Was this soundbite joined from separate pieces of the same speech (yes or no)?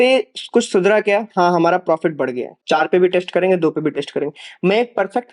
yes